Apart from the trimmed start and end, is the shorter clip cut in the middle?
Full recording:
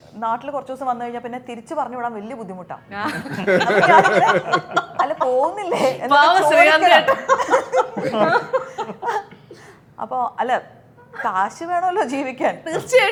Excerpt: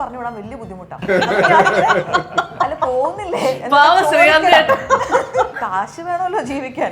yes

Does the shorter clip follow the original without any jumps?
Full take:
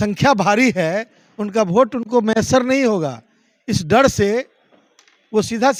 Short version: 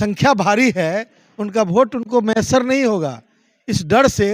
yes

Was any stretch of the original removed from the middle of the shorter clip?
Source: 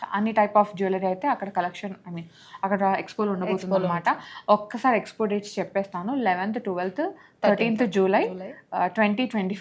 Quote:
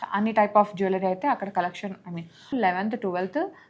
yes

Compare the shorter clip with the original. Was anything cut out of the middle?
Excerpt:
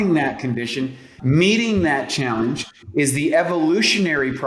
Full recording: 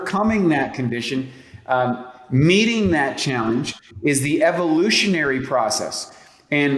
yes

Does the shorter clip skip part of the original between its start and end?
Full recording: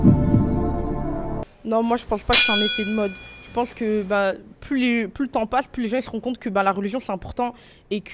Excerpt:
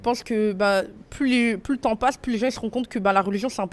no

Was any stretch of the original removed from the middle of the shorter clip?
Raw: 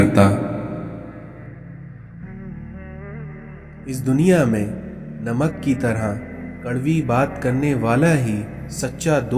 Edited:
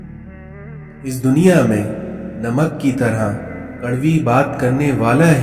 yes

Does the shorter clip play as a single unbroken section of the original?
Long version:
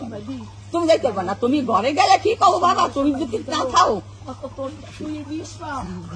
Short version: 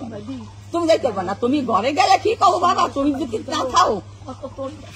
yes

